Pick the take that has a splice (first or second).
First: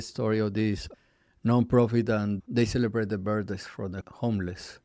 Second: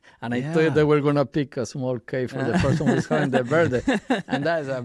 first